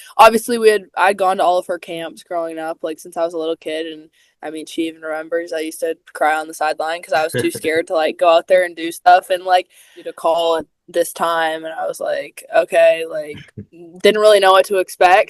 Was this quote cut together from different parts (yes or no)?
yes